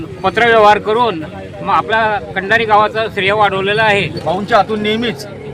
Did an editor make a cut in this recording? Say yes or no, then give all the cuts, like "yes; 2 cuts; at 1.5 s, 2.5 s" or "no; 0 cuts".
yes; 1 cut; at 4.1 s